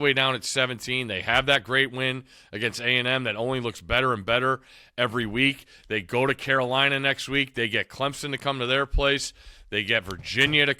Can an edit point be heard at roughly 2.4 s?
no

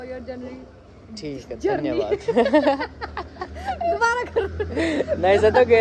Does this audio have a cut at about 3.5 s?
no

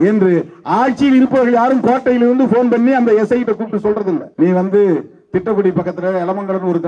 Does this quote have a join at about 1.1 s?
no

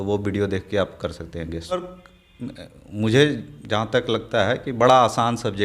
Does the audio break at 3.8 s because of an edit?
no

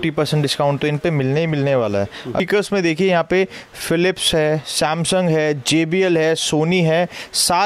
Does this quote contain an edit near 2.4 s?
yes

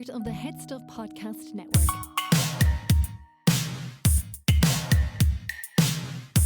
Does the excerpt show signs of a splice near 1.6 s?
yes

